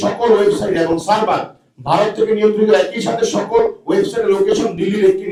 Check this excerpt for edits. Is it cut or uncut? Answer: uncut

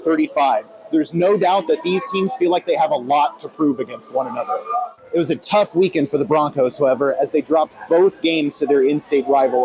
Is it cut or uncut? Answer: cut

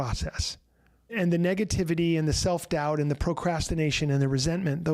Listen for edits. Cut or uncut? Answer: cut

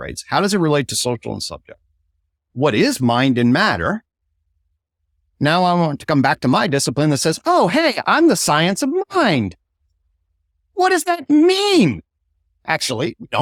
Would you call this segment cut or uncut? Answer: uncut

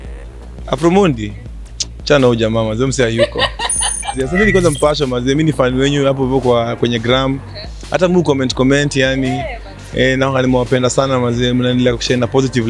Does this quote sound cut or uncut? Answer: cut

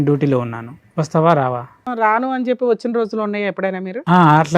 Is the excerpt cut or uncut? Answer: cut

